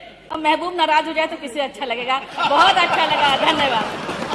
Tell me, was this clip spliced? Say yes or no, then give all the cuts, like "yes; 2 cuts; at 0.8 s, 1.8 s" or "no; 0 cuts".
no; 0 cuts